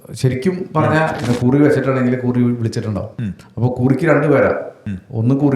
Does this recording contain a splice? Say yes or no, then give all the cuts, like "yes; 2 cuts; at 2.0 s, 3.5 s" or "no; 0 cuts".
yes; 1 cut; at 1.2 s